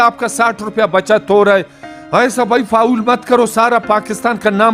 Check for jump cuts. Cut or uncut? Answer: uncut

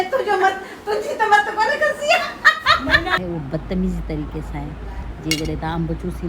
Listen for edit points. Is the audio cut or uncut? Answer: cut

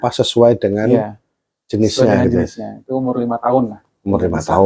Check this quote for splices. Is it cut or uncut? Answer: uncut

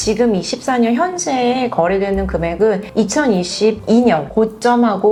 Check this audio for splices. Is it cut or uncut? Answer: uncut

